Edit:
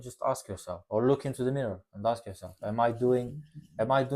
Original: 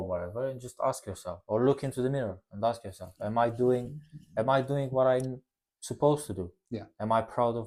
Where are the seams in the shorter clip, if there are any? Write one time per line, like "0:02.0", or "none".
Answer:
none